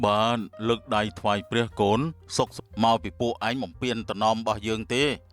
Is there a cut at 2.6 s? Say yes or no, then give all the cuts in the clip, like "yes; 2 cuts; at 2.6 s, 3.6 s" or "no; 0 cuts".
yes; 1 cut; at 2.6 s